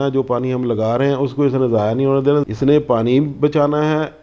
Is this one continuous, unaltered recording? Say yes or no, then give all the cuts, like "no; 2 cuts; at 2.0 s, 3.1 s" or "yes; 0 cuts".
no; 1 cut; at 2.4 s